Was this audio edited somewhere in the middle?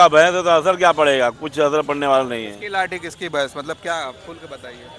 yes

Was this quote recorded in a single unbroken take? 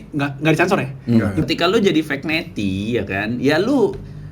no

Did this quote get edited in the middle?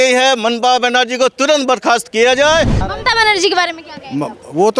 yes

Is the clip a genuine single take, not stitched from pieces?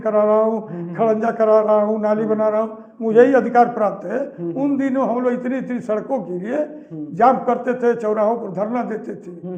yes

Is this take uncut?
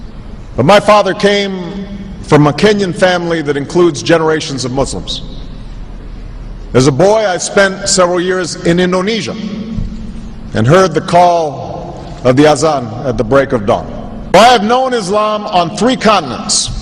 yes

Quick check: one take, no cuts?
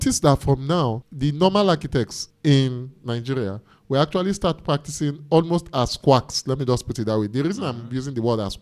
no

